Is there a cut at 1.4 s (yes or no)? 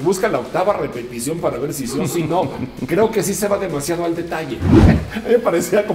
no